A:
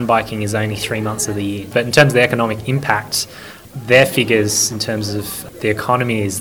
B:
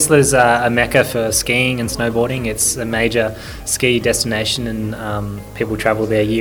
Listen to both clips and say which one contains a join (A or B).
A